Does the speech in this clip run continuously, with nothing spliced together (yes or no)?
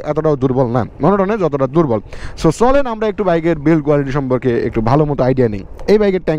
yes